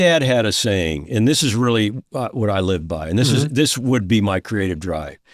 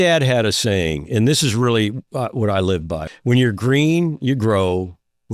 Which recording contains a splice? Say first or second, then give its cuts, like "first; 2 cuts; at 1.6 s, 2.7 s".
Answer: second; 1 cut; at 3.0 s